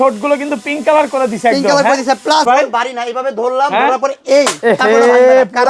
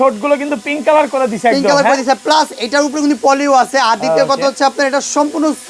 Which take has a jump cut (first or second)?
first